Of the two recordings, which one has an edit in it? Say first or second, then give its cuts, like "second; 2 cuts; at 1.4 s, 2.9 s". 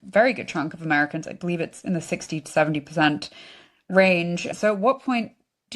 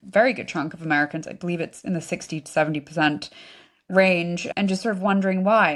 first; 1 cut; at 4.5 s